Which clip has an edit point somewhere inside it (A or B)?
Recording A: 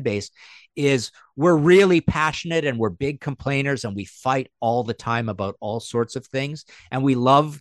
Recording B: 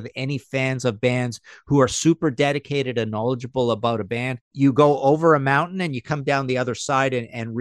B